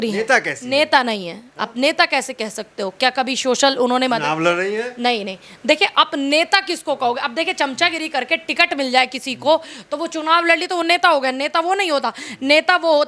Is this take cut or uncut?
uncut